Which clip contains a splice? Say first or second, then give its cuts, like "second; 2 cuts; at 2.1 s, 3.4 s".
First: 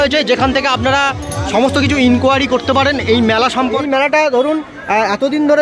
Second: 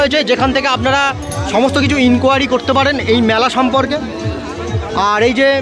first; 1 cut; at 3.8 s